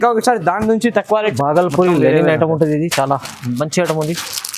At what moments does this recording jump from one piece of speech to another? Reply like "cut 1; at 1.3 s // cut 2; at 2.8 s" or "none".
cut 1; at 1.3 s